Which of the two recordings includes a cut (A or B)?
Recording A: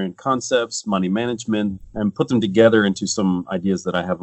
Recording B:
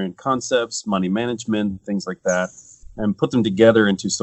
A